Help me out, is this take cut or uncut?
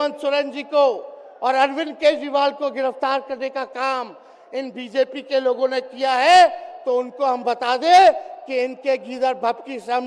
uncut